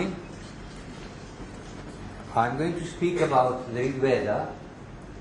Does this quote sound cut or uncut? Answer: cut